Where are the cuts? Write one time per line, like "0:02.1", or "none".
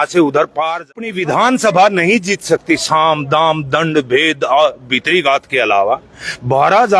0:01.0